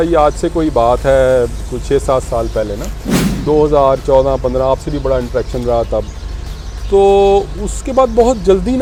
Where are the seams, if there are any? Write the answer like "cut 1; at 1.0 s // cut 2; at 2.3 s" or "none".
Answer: none